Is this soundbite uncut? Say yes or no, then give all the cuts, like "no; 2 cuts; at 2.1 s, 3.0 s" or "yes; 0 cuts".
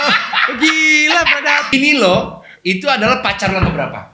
no; 1 cut; at 1.7 s